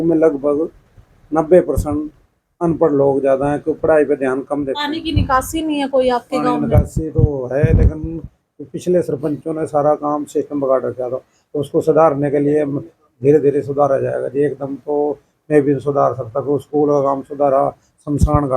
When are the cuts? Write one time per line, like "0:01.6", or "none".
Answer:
0:04.8